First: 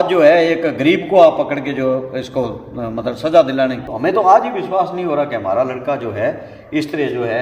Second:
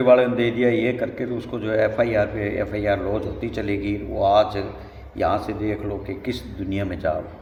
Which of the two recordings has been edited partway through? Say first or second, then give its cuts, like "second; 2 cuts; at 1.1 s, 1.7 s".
first; 1 cut; at 3.9 s